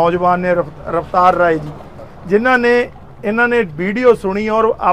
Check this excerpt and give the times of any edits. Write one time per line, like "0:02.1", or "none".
none